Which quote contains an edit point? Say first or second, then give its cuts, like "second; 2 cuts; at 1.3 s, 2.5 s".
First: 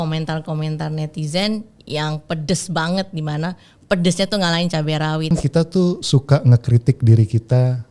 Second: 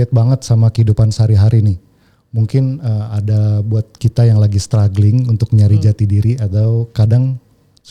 first; 1 cut; at 5.3 s